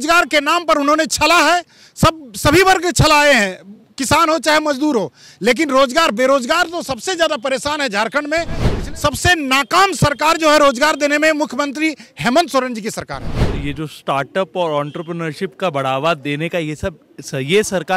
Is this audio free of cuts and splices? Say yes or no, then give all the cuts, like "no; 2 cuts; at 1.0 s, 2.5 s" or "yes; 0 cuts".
no; 2 cuts; at 8.7 s, 13.4 s